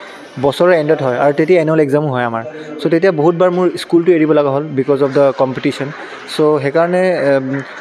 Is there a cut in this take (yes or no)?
no